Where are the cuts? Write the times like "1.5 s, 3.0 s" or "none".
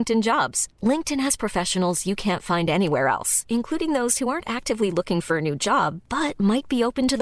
none